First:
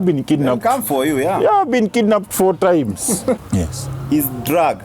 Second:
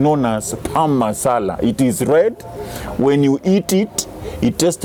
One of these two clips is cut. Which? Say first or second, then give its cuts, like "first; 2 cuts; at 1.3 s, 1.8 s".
first; 1 cut; at 3.4 s